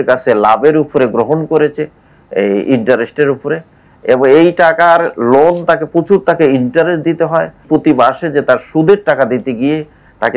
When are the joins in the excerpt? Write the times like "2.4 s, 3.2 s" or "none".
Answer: 7.7 s

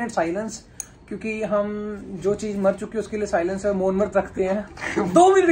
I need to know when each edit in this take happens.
none

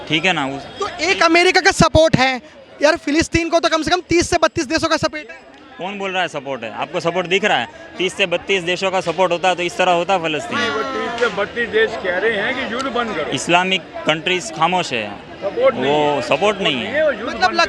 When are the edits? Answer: none

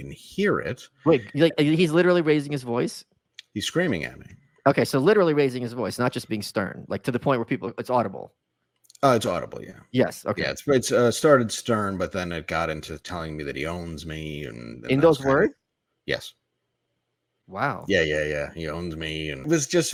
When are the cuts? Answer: none

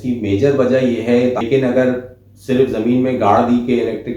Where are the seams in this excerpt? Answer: 1.4 s

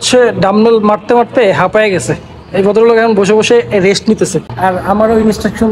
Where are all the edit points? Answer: none

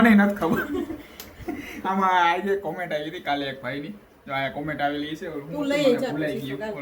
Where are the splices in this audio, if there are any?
none

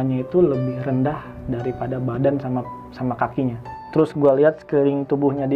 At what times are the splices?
3.8 s

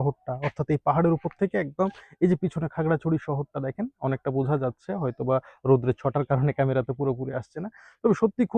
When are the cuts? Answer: none

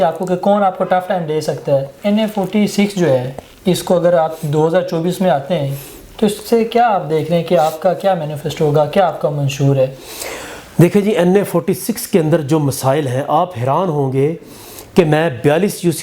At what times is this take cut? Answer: 1.9 s

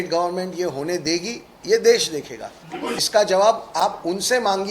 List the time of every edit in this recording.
2.9 s

